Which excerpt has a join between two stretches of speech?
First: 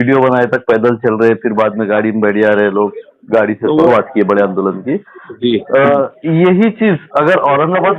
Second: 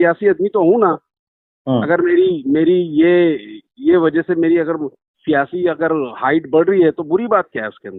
first; 1 cut; at 3.9 s

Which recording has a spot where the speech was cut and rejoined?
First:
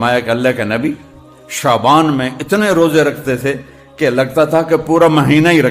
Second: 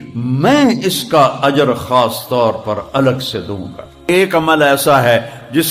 second; 1 cut; at 4.1 s

